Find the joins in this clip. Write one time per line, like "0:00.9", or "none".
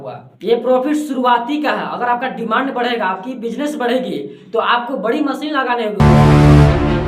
0:06.0